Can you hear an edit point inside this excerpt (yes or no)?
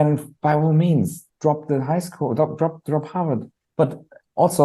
yes